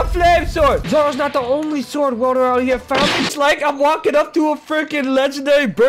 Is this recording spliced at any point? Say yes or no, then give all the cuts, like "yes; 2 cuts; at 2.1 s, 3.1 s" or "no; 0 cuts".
yes; 2 cuts; at 0.8 s, 3.2 s